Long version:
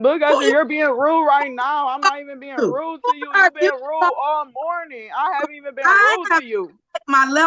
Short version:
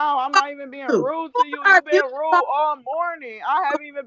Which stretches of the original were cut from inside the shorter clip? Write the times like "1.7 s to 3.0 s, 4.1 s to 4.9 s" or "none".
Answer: none

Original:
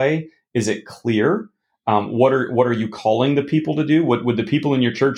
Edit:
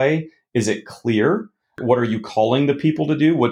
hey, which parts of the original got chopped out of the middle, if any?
1.8 s to 2.5 s

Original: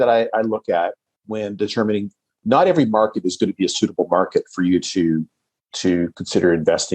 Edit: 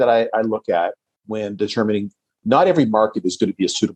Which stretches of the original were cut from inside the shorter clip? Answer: none

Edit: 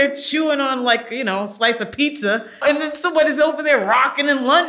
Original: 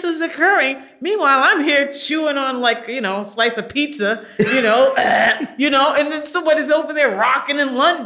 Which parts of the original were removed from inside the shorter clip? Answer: 4.4 s to 5.9 s

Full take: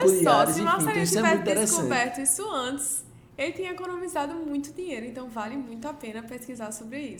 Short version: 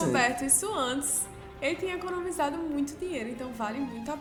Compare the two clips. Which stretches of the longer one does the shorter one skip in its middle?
none

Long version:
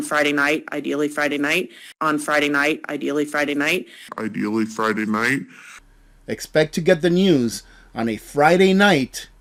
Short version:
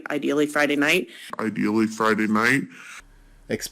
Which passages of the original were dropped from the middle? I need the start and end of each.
1.8 s to 3.9 s

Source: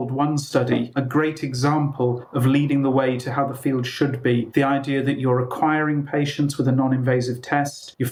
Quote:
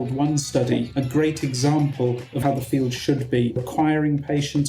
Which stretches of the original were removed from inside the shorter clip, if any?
2.3 s to 3.2 s, 4.5 s to 5.4 s

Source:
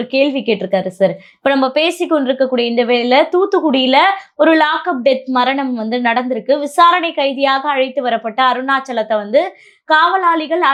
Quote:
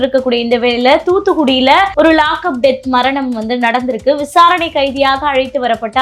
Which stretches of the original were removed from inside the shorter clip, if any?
4.2 s to 4.3 s

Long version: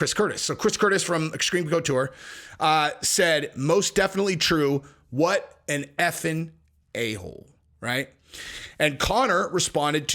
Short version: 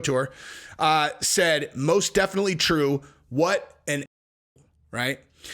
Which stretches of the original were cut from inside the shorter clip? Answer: 6.0 s to 7.1 s

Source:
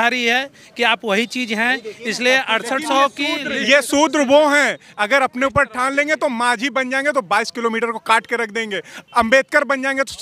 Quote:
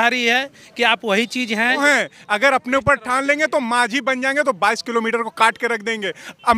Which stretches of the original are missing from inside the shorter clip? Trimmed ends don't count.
1.8 s to 4.5 s

